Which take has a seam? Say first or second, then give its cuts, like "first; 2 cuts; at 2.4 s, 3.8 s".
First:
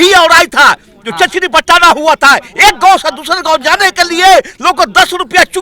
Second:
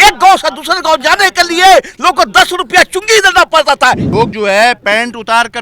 second; 1 cut; at 4.0 s